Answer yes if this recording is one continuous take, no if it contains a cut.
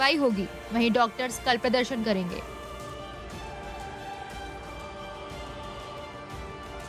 yes